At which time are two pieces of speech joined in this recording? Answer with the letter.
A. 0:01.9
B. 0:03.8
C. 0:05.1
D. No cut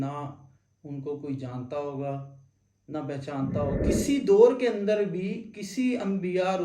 B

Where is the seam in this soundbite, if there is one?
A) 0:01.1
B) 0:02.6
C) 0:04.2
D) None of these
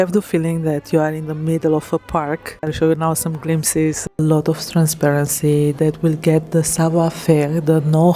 C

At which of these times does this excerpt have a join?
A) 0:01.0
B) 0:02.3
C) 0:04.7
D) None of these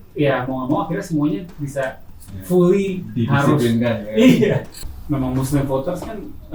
C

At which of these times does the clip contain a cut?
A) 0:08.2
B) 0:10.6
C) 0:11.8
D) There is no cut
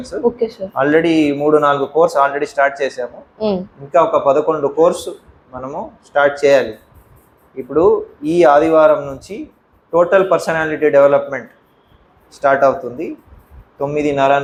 D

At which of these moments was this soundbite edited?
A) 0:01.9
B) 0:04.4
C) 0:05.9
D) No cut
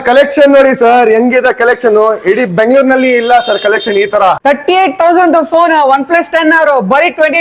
B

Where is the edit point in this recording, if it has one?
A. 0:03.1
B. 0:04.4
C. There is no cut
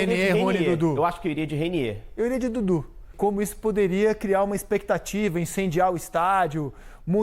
A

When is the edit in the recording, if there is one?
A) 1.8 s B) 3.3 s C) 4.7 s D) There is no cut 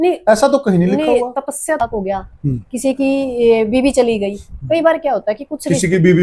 A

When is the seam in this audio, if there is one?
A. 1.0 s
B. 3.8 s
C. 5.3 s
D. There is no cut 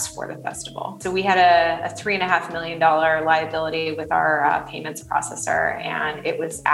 A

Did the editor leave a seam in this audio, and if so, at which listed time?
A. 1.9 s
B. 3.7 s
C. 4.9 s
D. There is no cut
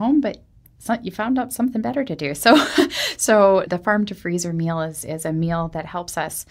B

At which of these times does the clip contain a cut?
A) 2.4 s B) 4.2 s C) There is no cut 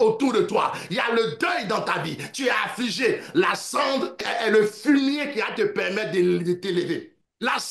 B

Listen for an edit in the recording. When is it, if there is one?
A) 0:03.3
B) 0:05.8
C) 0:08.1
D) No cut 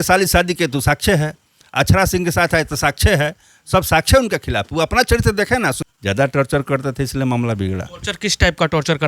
B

